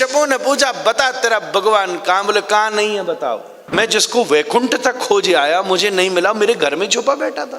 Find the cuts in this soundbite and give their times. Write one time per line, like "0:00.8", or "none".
0:03.7